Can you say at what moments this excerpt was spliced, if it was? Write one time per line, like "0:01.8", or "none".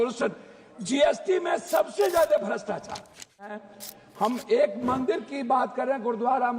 0:03.6